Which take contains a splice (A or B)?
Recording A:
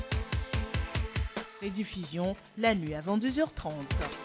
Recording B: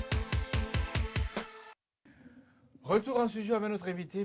A